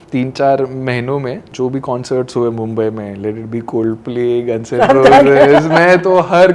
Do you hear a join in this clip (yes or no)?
no